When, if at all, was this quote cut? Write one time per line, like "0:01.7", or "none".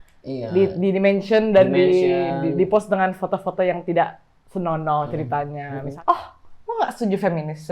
0:05.8